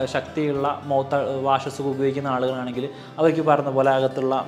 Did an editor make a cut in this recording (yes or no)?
no